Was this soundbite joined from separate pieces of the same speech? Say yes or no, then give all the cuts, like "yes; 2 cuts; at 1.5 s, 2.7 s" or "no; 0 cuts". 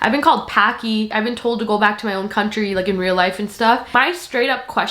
yes; 2 cuts; at 1.1 s, 3.9 s